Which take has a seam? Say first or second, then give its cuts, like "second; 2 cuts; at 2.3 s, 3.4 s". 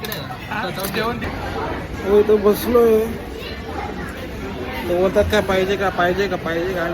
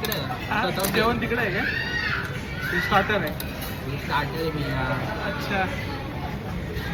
first; 1 cut; at 1.2 s